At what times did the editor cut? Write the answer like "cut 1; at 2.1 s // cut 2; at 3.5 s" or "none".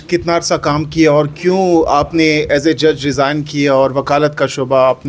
none